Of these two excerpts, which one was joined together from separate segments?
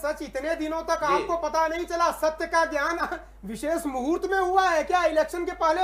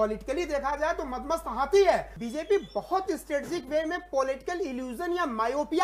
second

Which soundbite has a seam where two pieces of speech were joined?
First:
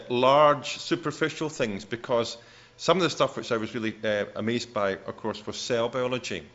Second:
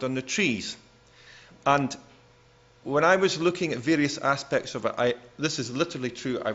first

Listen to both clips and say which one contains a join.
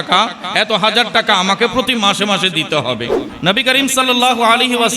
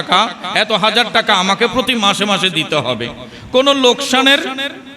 first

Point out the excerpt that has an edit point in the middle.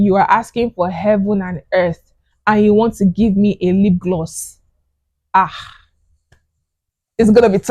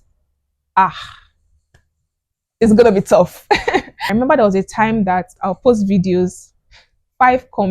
second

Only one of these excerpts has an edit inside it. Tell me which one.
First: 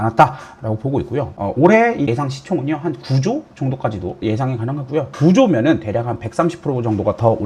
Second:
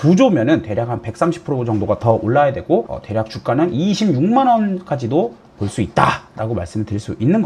first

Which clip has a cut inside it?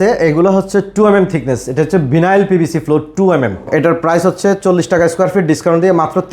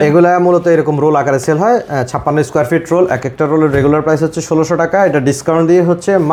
first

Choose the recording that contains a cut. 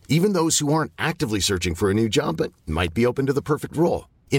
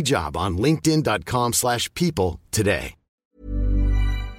second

